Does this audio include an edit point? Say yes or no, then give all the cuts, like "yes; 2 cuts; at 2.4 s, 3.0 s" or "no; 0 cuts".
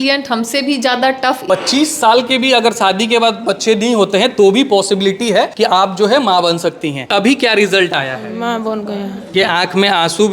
yes; 4 cuts; at 1.4 s, 5.5 s, 7.0 s, 9.3 s